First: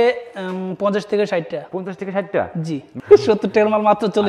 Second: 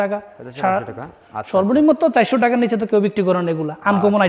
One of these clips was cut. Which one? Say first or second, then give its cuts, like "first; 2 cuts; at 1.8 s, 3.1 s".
first; 1 cut; at 2.8 s